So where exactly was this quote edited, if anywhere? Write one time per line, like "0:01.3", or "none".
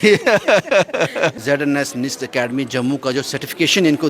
0:01.4